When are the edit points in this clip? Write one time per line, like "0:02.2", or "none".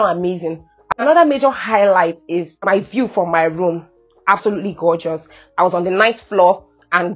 0:01.0
0:02.5